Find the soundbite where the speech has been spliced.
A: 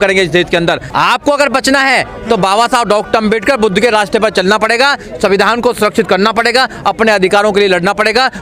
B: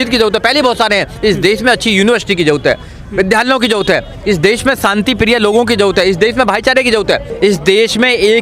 B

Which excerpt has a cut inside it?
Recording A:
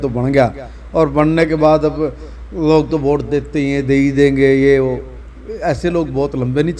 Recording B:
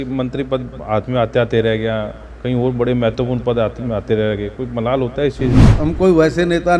B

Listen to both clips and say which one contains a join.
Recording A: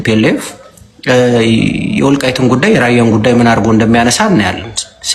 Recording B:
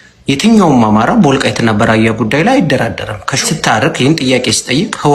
B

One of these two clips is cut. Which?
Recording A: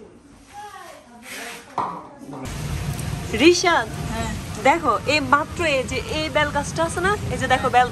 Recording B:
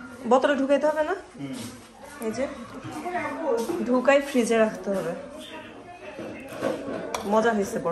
A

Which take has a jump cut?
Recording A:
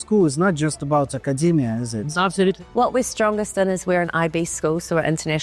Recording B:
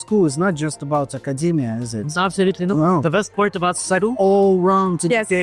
A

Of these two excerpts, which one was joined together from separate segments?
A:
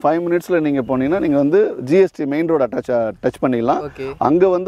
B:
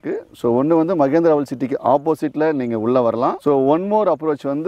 B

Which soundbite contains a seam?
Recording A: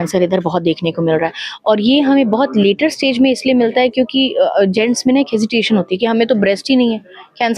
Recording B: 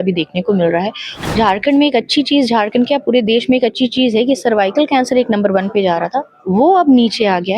B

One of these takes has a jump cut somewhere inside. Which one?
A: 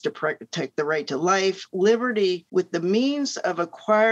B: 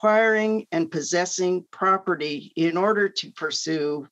A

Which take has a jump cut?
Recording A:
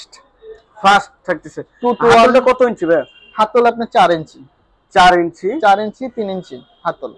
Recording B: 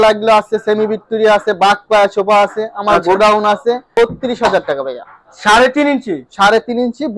B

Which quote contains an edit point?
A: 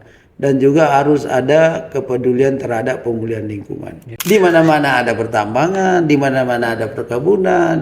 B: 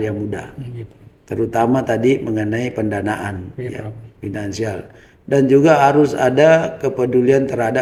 A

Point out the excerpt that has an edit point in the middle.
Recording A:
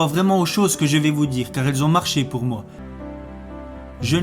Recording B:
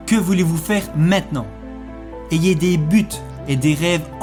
A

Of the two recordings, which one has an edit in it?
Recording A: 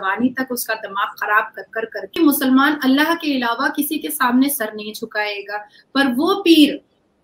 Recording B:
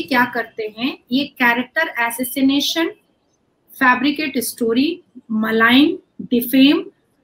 A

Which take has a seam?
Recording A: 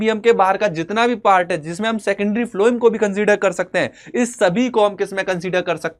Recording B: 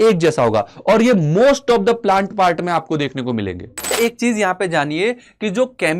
B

